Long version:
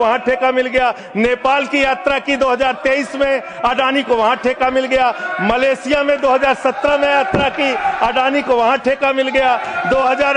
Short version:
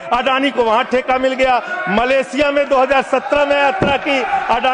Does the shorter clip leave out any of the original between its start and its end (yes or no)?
no